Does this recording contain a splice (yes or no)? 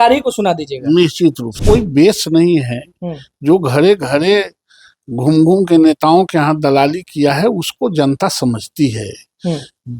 yes